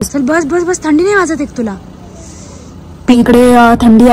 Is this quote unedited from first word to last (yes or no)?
no